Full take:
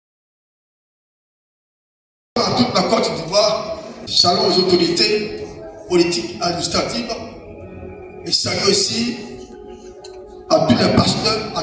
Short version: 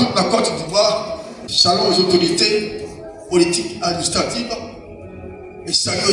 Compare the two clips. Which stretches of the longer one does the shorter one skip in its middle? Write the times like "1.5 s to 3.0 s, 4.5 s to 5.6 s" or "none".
none